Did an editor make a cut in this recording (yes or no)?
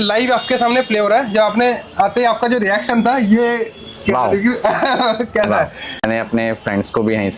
no